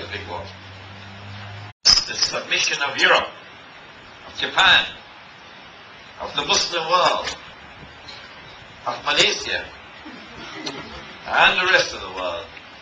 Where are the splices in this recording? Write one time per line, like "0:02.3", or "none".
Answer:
none